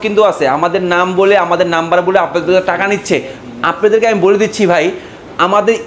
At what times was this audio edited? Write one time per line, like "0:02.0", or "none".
none